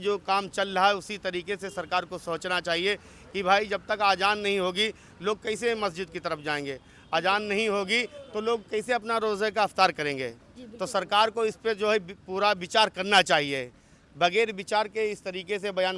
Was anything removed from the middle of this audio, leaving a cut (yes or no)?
no